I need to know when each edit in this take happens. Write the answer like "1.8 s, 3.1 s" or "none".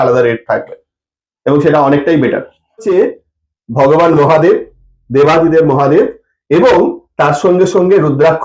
2.8 s